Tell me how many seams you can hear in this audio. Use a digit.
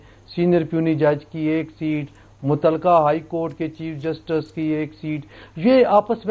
0